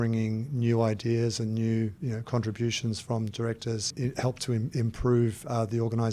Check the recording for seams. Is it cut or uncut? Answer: cut